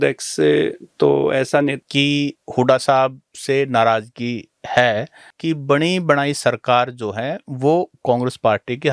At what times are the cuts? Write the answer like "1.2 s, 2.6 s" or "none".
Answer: 1.8 s, 5.3 s